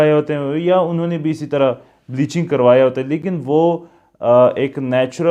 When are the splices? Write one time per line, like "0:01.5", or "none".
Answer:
none

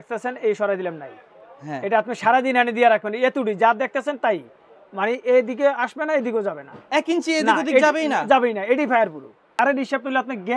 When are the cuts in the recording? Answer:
0:09.6

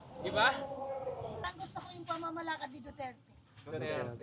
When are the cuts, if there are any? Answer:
0:01.4

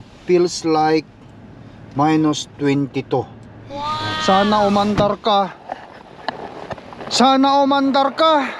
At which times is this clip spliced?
0:04.1

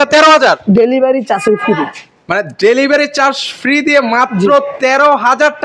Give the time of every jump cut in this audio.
none

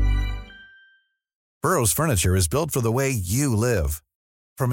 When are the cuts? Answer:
0:01.4

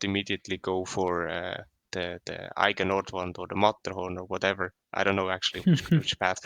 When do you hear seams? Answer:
none

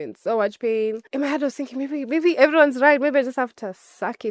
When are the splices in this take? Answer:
0:01.0

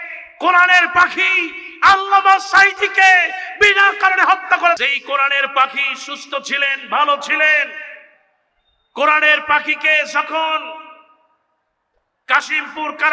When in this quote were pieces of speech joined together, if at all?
0:04.8

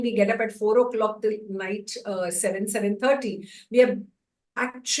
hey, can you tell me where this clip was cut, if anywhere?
none

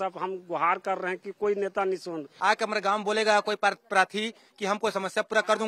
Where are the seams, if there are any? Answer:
0:02.3

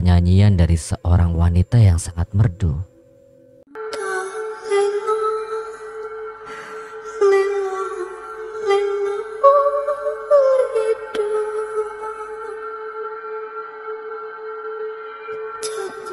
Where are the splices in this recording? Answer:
0:03.8

